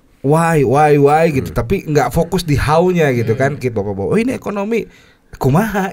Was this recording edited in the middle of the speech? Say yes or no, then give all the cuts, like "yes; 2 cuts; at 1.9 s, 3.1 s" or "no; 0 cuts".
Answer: yes; 1 cut; at 3.6 s